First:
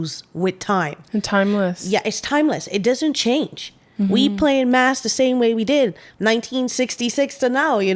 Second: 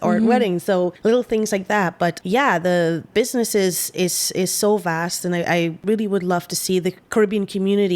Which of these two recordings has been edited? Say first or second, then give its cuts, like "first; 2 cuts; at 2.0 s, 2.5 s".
second; 5 cuts; at 1.0 s, 2.2 s, 3.1 s, 5.8 s, 7.0 s